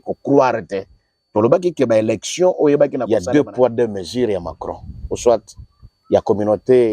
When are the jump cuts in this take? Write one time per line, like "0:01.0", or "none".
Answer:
0:03.0